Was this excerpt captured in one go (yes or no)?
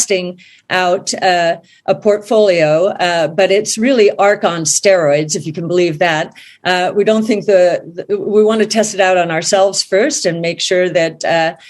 yes